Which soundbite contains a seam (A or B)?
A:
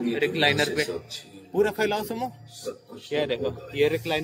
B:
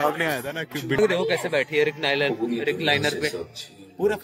B